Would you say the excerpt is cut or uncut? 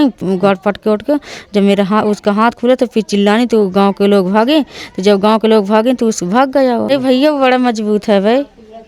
cut